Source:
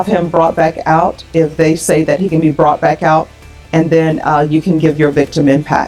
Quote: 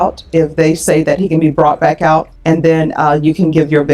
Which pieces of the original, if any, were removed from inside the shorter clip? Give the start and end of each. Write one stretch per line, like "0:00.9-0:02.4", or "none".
0:03.3-0:03.6